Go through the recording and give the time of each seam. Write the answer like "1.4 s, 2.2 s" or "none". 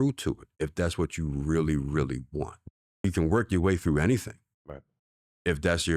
3.0 s